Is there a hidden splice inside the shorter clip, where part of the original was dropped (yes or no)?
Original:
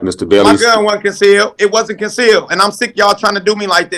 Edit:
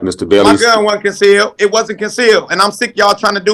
no